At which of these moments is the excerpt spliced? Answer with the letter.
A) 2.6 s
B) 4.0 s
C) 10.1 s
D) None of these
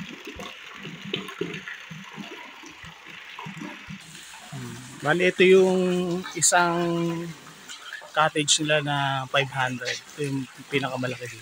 B